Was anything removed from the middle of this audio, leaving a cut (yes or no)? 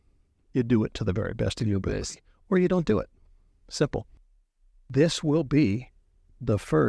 yes